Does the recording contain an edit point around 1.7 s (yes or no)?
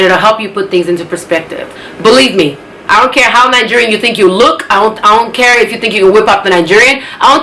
yes